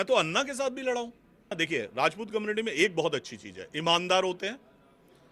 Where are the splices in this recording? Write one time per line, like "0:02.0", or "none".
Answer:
0:01.5

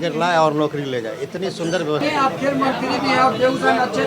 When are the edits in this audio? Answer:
0:02.0

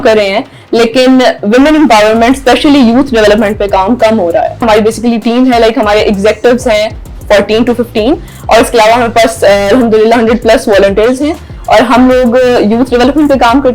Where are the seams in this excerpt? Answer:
0:04.6

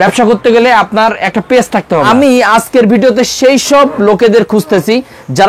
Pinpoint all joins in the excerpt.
0:02.4

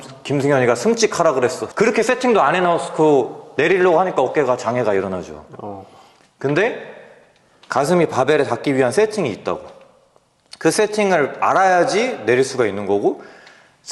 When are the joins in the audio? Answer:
0:01.6

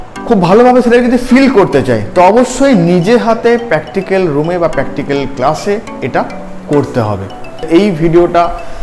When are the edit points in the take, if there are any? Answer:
0:07.7

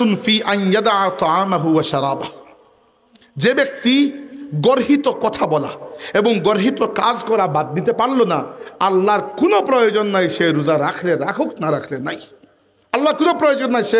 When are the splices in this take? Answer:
none

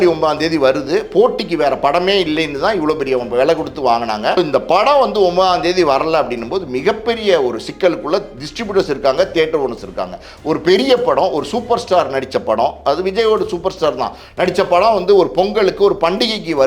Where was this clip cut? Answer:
0:04.4

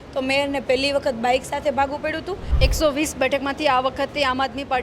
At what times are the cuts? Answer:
0:02.5

